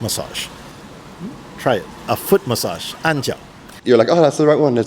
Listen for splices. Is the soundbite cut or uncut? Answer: cut